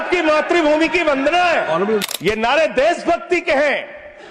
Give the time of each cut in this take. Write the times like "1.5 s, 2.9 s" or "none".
2.0 s

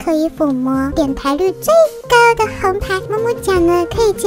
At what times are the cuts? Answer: 0.9 s, 3.0 s

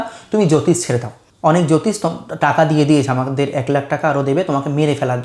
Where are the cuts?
1.2 s

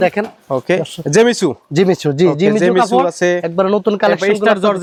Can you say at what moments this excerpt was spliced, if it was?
none

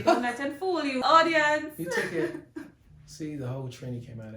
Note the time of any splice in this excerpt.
1.0 s

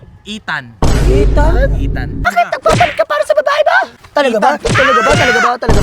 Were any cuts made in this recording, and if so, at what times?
2.2 s, 4.0 s

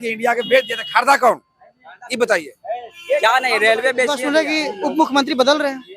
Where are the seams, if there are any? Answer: 4.2 s

